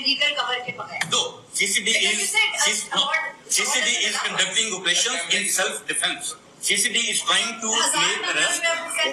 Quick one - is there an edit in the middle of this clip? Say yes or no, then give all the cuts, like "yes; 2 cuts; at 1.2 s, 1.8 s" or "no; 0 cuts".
no; 0 cuts